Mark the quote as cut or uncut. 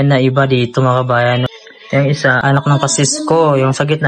cut